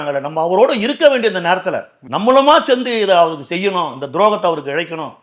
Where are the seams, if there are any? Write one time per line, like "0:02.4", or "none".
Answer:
none